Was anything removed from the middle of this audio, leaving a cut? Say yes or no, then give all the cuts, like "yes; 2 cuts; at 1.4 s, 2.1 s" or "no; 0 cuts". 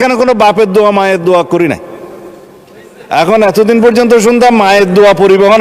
no; 0 cuts